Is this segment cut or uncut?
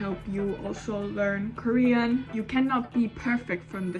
cut